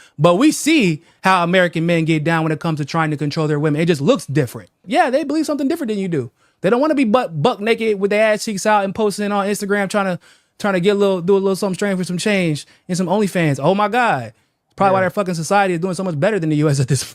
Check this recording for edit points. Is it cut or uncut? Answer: cut